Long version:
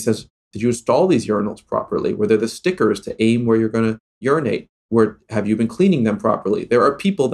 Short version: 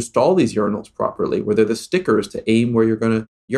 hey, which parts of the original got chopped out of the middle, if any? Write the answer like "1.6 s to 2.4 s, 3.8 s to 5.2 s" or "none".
none

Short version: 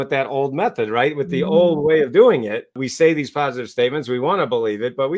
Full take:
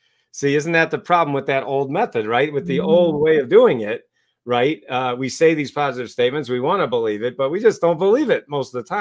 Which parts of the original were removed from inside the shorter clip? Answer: 4.2 s to 5.2 s

